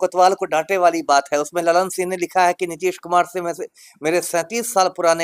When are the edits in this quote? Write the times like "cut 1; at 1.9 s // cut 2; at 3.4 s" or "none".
none